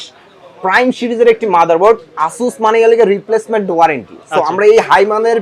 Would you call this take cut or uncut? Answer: uncut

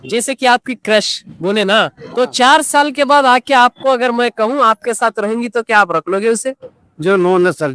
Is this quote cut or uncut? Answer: uncut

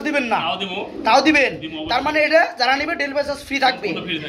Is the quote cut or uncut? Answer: uncut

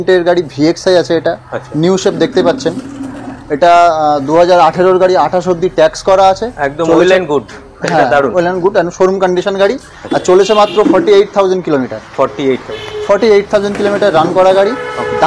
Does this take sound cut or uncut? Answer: uncut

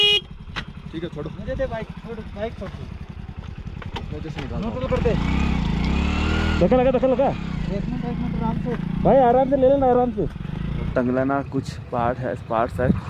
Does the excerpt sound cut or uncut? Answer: cut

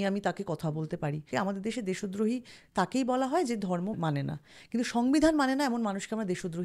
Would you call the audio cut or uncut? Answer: cut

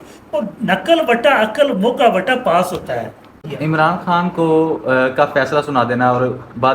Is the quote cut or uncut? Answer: cut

